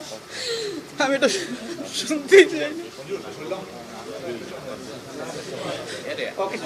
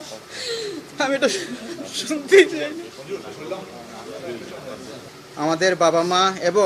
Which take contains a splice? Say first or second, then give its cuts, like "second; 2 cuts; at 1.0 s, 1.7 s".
second; 1 cut; at 5.0 s